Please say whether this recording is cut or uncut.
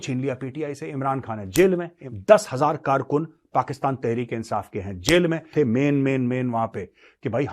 cut